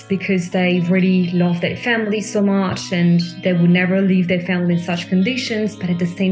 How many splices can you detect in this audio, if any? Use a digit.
0